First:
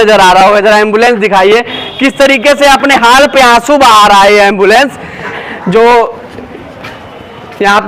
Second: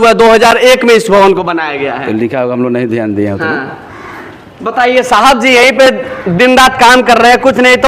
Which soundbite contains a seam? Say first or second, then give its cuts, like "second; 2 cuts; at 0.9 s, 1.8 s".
first; 1 cut; at 5.4 s